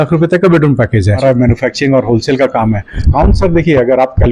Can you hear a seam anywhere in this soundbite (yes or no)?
yes